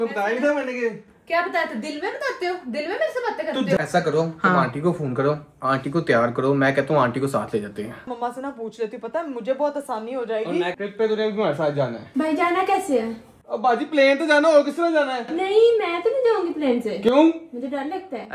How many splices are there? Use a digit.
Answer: 4